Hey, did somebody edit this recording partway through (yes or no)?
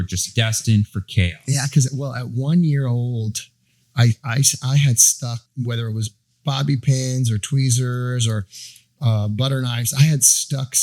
yes